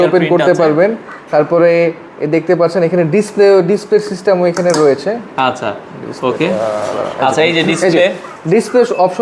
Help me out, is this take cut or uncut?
uncut